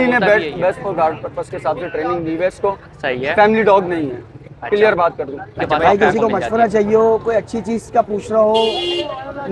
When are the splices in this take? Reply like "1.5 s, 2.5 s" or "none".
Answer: 5.7 s